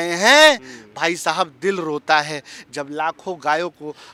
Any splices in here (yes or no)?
no